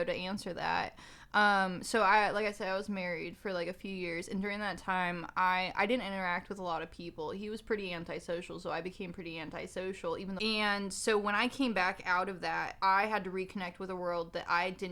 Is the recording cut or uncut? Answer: cut